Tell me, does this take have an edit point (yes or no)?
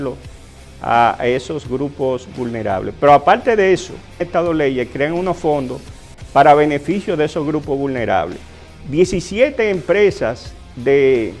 no